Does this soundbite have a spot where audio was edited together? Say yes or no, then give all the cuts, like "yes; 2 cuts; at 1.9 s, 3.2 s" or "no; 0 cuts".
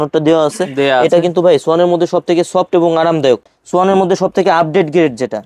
yes; 1 cut; at 3.5 s